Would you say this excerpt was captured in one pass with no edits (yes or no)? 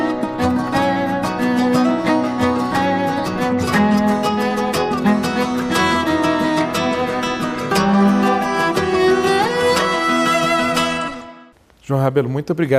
yes